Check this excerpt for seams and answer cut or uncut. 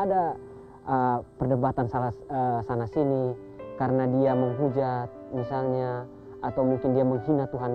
uncut